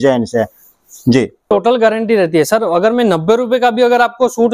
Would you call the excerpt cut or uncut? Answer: cut